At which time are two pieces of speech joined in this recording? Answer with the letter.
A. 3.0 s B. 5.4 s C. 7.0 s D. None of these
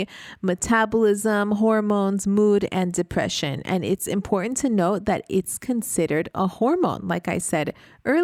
D